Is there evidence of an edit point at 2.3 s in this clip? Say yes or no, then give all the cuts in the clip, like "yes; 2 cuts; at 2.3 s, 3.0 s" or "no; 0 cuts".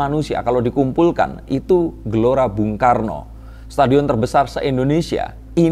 no; 0 cuts